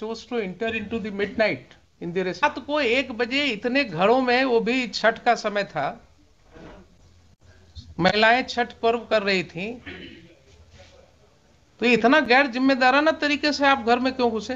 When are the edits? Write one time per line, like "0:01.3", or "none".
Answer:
0:02.4